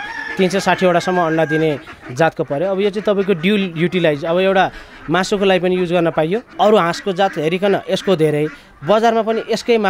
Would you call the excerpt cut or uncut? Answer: cut